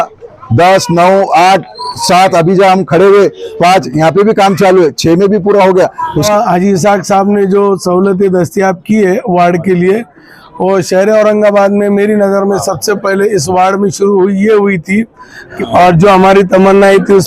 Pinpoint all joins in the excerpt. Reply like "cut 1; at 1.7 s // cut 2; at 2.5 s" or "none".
cut 1; at 6.3 s // cut 2; at 15.5 s